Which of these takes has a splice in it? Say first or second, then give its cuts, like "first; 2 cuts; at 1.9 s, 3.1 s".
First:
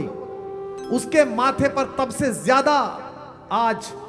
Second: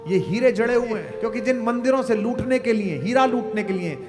second; 1 cut; at 1.1 s